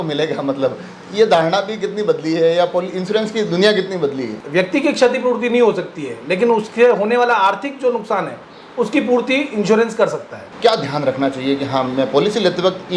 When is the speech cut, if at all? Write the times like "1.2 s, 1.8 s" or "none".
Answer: 4.4 s, 10.4 s